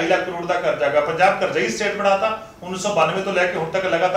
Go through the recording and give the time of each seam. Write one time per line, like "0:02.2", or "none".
none